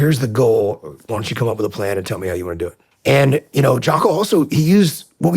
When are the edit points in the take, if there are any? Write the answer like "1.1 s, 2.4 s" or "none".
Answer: 2.9 s